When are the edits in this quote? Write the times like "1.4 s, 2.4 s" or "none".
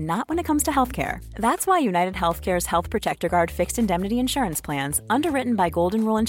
none